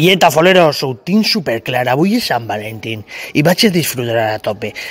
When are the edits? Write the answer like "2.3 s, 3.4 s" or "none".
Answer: none

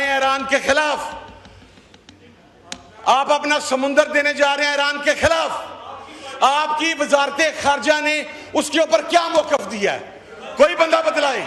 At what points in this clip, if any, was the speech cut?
none

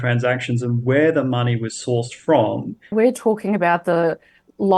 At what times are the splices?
2.9 s

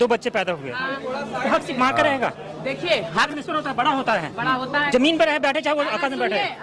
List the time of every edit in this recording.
3.3 s

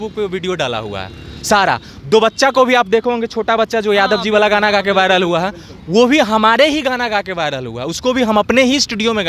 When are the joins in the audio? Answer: none

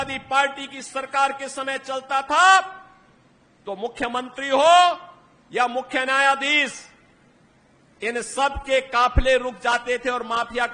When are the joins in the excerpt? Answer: none

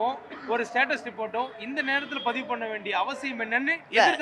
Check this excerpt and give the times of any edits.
none

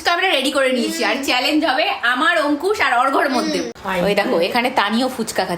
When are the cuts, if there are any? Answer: 3.8 s

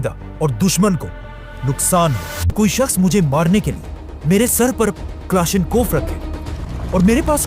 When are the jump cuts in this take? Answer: 2.5 s

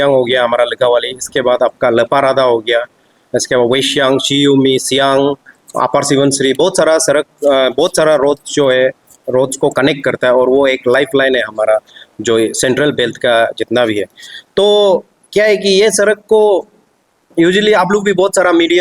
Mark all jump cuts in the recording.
none

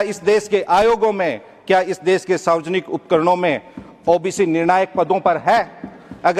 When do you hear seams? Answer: none

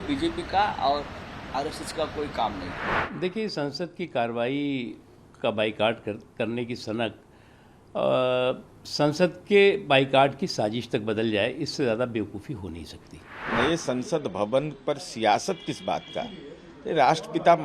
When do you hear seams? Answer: 3.0 s, 13.4 s

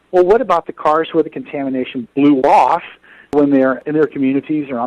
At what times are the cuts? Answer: none

